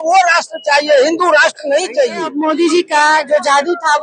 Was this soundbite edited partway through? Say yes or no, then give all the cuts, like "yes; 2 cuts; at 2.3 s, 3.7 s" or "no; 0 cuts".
yes; 1 cut; at 2.4 s